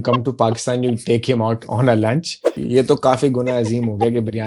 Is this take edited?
yes; 1 cut; at 2.6 s

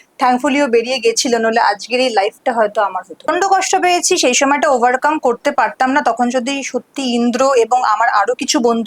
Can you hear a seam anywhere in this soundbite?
yes; 1 cut; at 3.3 s

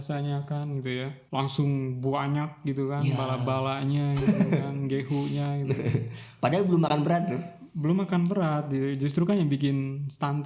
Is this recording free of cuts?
no; 1 cut; at 1.2 s

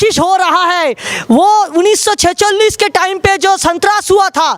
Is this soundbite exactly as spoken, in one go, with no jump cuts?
yes; 0 cuts

